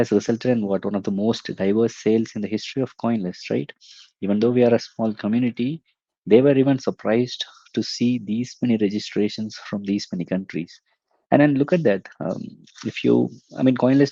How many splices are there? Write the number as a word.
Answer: zero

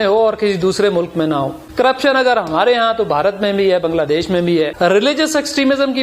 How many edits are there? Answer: two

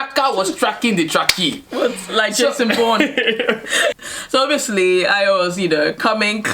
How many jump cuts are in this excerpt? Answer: one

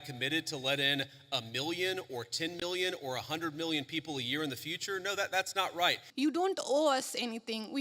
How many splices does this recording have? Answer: one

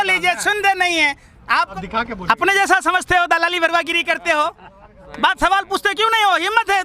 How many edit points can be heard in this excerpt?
one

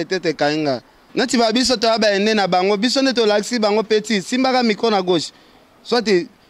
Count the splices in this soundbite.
one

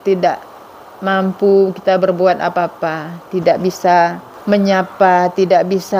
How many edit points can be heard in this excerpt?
one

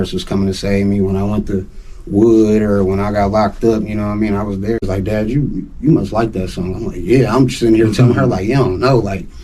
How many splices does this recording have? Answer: one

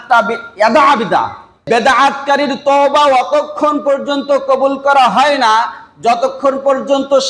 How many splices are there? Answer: one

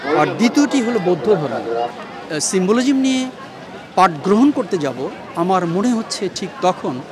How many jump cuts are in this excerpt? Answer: one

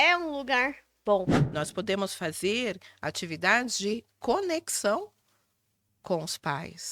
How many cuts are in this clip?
one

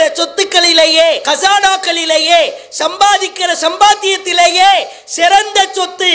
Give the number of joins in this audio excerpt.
one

